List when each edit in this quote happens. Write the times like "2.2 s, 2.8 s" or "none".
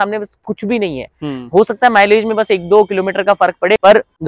none